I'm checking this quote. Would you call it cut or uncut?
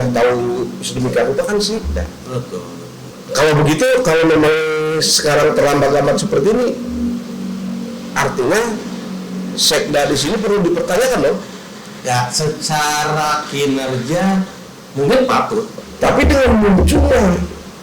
cut